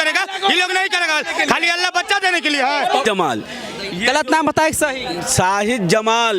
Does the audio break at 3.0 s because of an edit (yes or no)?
yes